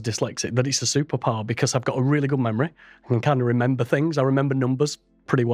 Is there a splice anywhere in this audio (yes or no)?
no